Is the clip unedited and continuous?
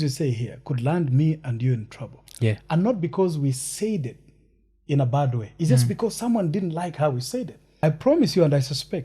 no; 1 cut; at 7.6 s

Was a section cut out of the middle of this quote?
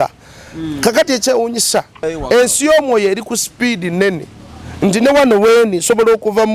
yes; 1 cut; at 2.0 s

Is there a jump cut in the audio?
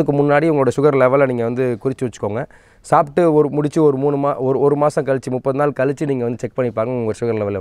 no; 0 cuts

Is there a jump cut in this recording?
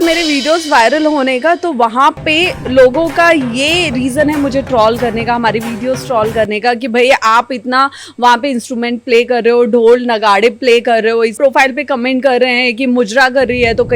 yes; 1 cut; at 11.3 s

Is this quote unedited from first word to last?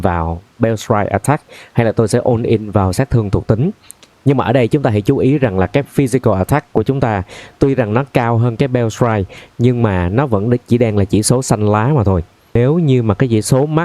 yes; 0 cuts

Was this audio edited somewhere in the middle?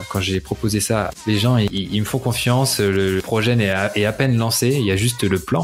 yes; 1 cut; at 1.2 s

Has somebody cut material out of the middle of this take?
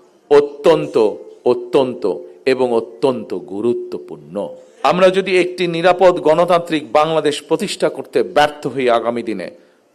yes; 1 cut; at 4.8 s

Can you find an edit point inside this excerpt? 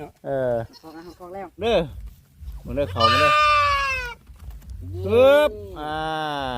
yes; 1 cut; at 1.6 s

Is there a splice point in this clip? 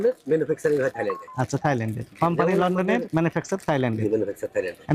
no; 0 cuts

